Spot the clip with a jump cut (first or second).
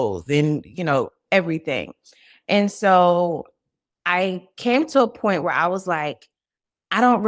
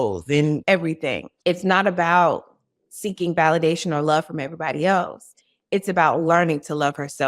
second